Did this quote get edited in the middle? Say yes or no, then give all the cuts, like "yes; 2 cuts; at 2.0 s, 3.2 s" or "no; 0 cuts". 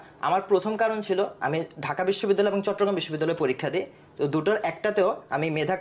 no; 0 cuts